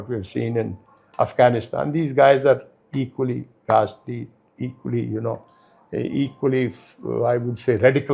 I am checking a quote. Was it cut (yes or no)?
no